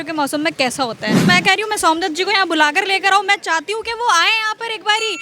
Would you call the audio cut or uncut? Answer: cut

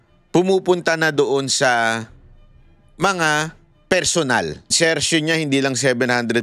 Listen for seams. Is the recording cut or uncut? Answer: cut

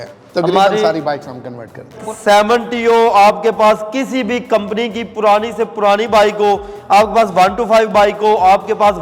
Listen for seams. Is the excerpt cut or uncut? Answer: cut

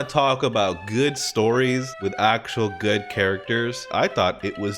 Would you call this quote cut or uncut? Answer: cut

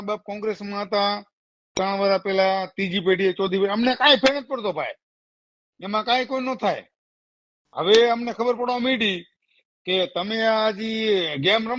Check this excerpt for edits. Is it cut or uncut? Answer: uncut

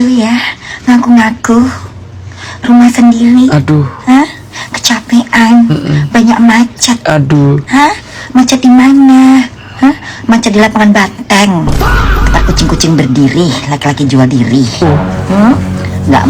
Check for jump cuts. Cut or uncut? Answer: uncut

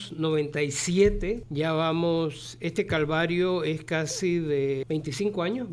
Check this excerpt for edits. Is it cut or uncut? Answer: cut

